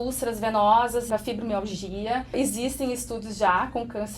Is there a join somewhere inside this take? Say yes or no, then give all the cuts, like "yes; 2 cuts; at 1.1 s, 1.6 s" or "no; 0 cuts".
yes; 2 cuts; at 1.1 s, 2.4 s